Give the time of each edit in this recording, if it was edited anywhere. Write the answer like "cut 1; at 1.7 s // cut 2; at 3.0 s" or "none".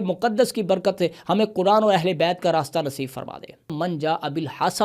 cut 1; at 3.7 s